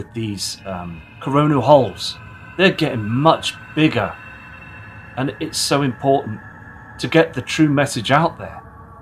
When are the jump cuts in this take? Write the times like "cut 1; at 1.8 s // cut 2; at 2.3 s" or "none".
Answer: cut 1; at 3.1 s

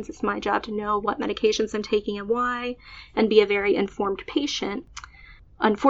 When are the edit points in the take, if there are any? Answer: cut 1; at 4.9 s

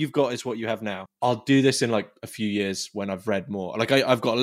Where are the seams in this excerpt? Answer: cut 1; at 1.0 s

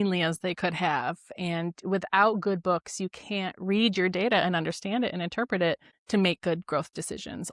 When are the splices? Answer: cut 1; at 5.9 s

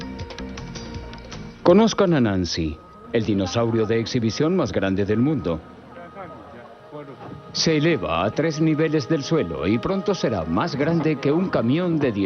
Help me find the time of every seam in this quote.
cut 1; at 5.2 s

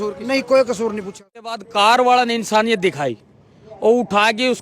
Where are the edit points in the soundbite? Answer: cut 1; at 1.6 s

